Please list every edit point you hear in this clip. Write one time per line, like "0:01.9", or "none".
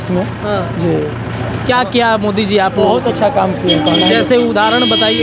none